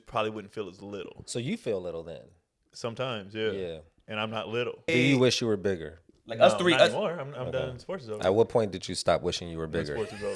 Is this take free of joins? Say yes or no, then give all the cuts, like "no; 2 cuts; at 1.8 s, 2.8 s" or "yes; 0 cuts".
no; 2 cuts; at 1.2 s, 4.9 s